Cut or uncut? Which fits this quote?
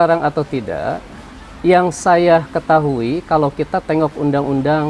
uncut